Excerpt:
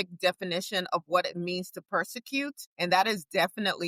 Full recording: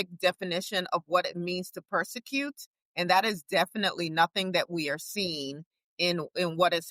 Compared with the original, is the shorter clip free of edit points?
no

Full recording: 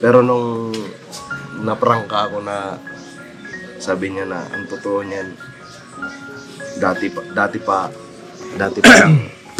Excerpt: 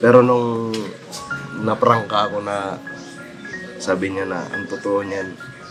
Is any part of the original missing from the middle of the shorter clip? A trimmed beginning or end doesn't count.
no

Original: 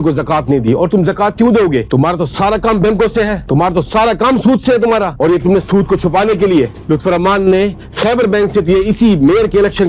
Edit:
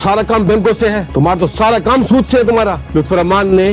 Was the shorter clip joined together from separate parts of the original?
yes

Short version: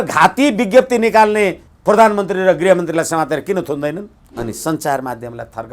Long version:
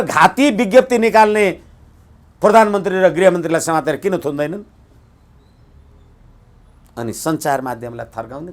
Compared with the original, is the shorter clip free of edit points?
no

